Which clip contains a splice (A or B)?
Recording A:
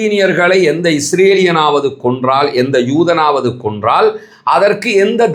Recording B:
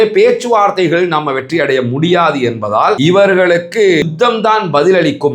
B